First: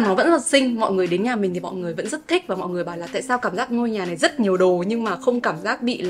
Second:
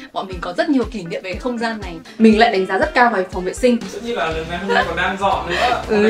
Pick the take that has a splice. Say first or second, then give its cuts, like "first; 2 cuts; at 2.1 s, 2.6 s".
second; 2 cuts; at 2.0 s, 3.9 s